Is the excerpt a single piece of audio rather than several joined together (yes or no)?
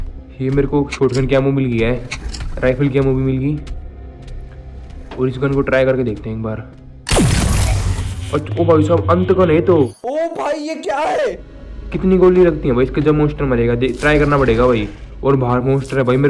no